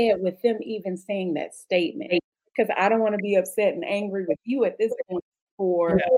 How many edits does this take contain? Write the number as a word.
one